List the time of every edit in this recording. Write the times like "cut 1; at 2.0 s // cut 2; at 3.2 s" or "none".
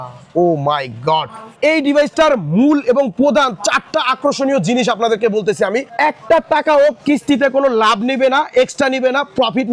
cut 1; at 1.4 s // cut 2; at 5.9 s